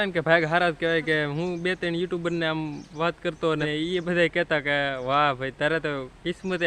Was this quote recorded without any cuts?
no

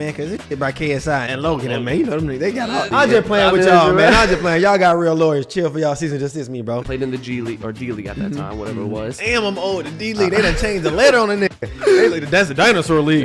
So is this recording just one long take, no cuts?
no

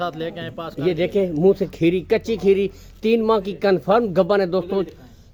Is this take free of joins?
yes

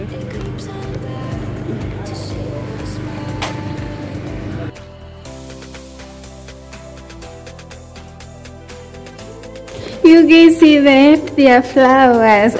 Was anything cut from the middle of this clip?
no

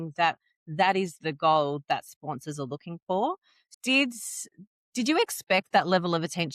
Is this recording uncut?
no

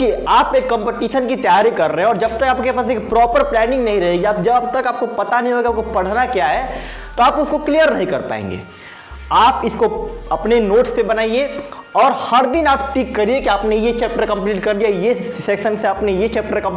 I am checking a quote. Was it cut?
no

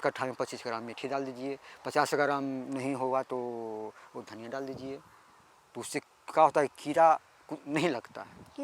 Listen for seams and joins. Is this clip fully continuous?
yes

